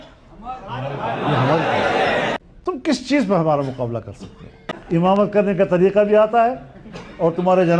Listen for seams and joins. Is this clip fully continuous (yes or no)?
no